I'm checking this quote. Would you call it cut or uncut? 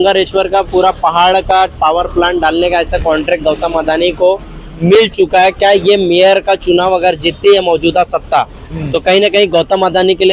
uncut